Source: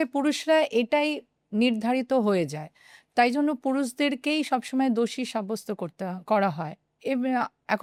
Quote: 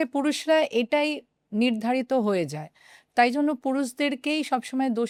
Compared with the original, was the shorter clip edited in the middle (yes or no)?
no